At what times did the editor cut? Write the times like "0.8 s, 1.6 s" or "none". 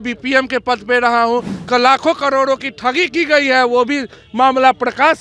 1.5 s

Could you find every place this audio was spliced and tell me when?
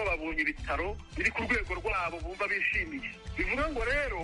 1.0 s, 3.2 s

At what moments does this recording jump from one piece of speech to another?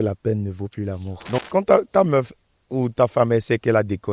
1.4 s

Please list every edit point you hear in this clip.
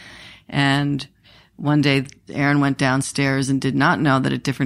2.3 s

